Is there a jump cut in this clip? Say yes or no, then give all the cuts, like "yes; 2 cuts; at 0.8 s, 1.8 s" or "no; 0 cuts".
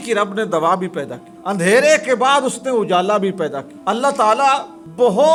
no; 0 cuts